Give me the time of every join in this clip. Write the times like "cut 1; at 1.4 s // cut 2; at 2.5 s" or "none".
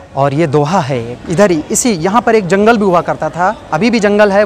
cut 1; at 1.1 s